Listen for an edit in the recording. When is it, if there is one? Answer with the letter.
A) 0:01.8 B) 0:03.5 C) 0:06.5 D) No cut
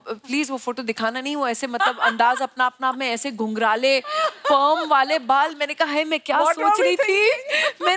D